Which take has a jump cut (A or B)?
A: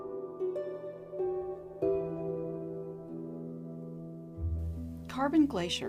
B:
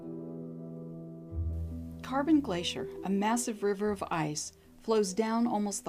A